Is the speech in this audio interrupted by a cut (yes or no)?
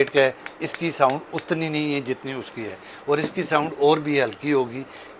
no